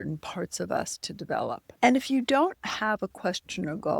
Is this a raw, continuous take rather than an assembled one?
no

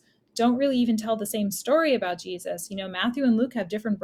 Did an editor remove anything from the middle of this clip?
no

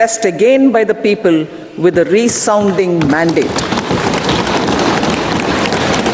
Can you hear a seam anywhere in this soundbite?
no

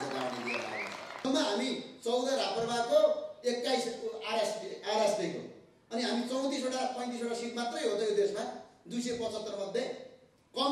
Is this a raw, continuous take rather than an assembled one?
no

